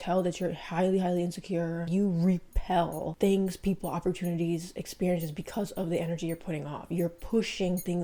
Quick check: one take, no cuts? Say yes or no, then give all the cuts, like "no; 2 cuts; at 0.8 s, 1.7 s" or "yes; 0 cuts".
yes; 0 cuts